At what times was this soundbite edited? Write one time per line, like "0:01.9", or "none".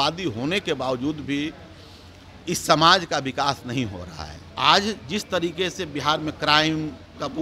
0:04.5